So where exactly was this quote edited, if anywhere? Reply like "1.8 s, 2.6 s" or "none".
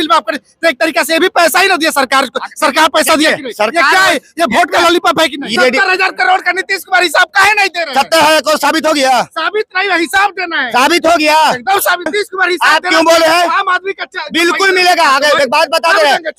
5.5 s, 12.1 s